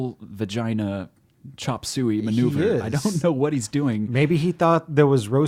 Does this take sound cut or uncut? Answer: uncut